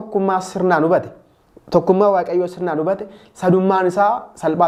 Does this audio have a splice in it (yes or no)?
no